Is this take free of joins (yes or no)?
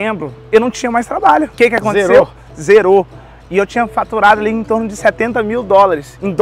yes